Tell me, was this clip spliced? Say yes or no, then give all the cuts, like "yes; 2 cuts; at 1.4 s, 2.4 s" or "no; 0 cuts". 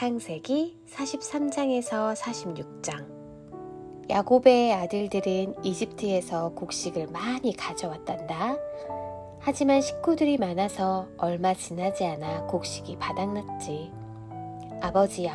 no; 0 cuts